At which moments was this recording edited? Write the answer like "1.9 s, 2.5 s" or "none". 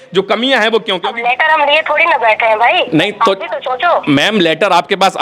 1.0 s